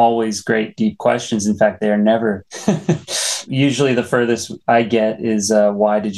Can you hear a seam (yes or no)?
no